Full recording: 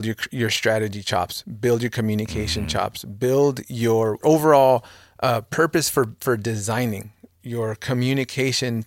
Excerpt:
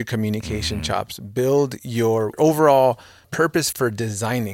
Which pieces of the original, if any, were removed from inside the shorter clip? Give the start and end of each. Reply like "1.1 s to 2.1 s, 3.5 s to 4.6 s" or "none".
5.4 s to 6.0 s